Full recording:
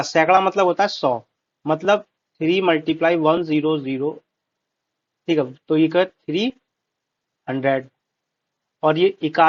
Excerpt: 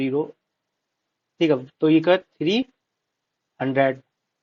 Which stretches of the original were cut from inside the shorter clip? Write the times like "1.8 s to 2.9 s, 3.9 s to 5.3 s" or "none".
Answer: none